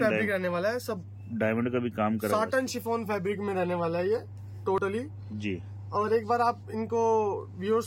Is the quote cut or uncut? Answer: uncut